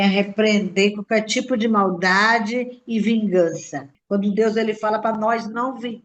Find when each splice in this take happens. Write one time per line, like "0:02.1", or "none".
0:03.9

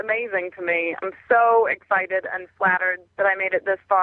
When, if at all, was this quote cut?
0:01.0
0:03.0

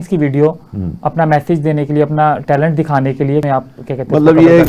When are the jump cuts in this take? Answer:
0:03.4

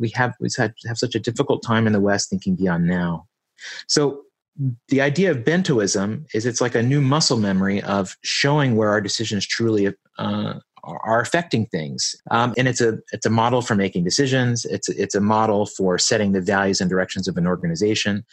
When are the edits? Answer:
0:12.3

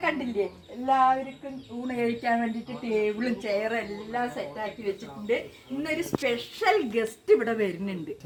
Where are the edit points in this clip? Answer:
none

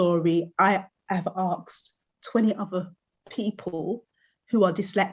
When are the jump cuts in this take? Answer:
none

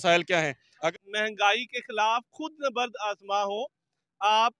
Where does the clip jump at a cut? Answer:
0:00.9

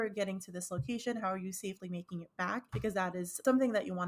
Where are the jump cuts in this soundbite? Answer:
0:03.1

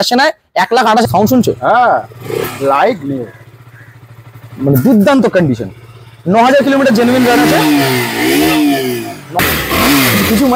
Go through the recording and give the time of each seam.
0:01.1
0:09.4

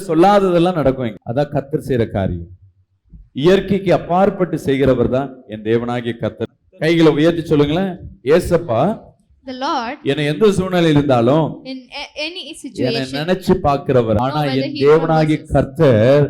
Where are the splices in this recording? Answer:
0:06.4
0:14.2

